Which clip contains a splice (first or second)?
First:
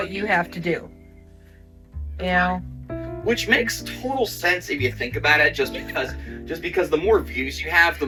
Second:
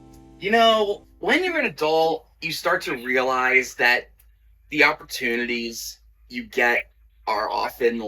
second